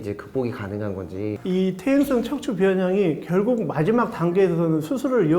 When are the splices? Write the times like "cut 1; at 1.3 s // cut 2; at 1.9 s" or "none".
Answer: cut 1; at 1.4 s